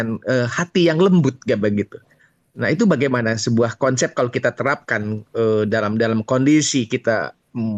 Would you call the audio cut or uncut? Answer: uncut